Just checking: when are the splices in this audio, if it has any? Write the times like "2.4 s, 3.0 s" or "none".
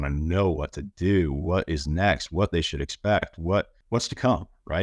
3.8 s